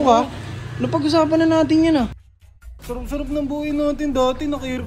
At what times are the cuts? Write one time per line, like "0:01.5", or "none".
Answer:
0:02.7